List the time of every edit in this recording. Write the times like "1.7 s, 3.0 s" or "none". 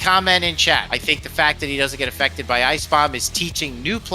0.9 s

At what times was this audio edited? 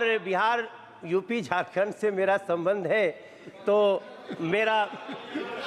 none

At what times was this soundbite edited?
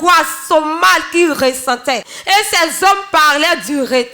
2.1 s

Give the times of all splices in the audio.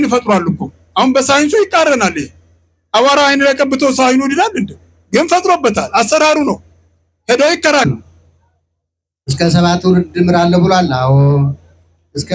7.8 s

